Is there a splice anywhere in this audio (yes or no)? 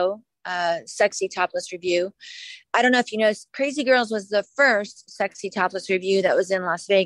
no